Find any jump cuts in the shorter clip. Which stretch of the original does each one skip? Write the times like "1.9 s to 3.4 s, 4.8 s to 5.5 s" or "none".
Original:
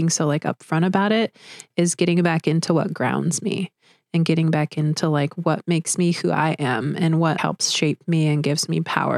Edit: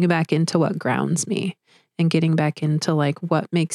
none